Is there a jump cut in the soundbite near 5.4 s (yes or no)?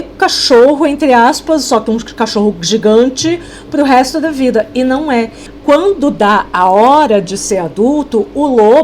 yes